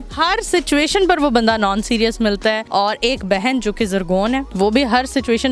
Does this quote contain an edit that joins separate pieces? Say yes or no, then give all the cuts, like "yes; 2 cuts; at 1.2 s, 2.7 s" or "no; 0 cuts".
yes; 2 cuts; at 2.6 s, 4.5 s